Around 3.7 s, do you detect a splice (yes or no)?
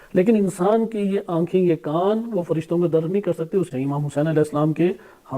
yes